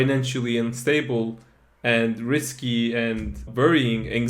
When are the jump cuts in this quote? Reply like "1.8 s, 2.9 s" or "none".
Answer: none

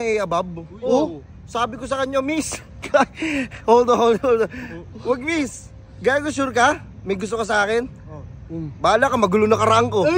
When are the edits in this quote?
none

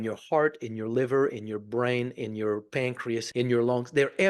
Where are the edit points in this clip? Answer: 3.3 s

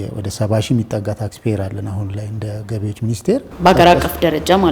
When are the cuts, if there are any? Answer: 3.5 s

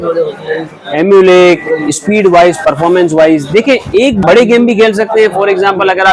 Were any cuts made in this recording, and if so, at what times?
4.2 s

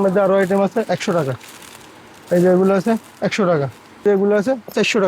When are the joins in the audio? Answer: 4.0 s

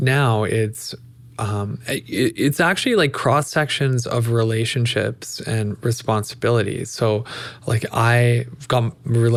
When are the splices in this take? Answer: none

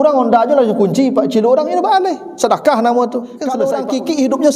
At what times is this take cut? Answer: 3.6 s

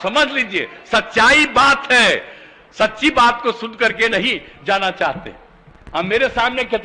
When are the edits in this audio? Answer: none

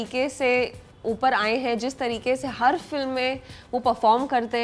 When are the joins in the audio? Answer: none

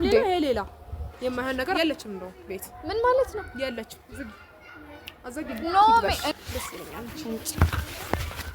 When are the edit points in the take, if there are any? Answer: 1.8 s, 6.2 s

